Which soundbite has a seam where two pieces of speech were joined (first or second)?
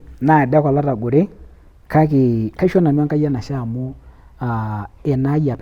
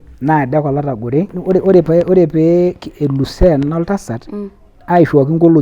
second